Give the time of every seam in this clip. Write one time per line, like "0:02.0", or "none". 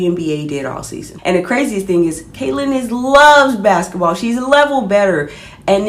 0:01.1